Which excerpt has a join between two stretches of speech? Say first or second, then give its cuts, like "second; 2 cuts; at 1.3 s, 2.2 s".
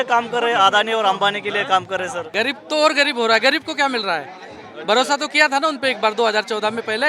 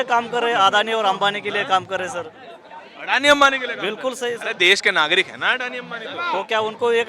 first; 1 cut; at 2.3 s